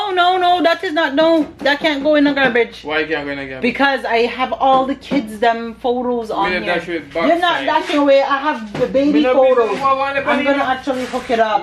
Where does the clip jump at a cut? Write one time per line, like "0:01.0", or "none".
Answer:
none